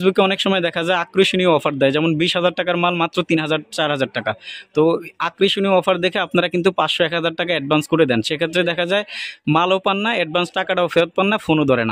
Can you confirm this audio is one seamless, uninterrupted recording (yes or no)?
yes